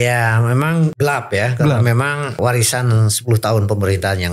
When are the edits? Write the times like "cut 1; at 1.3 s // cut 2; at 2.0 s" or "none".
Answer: cut 1; at 0.9 s // cut 2; at 2.4 s